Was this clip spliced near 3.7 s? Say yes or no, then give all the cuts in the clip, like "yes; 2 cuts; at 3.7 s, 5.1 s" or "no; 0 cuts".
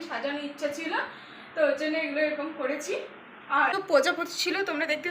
yes; 1 cut; at 3.7 s